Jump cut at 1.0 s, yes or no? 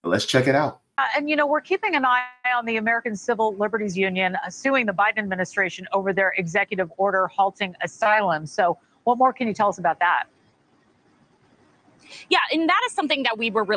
yes